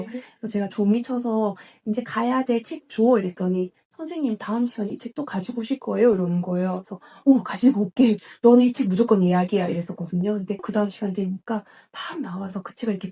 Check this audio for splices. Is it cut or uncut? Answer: uncut